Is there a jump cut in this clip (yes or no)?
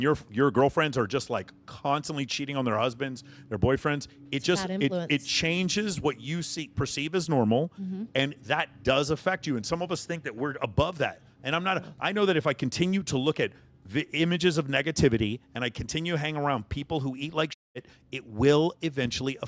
no